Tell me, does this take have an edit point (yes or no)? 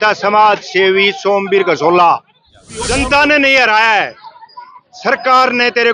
yes